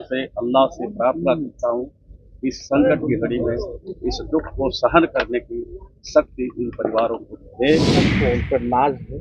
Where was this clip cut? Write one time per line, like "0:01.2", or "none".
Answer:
0:08.1